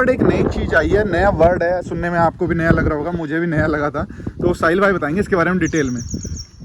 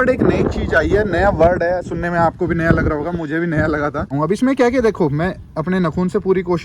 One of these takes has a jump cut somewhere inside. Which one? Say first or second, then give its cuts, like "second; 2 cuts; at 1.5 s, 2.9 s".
second; 1 cut; at 4.1 s